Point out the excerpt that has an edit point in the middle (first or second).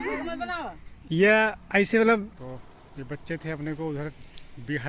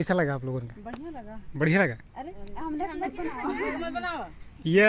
first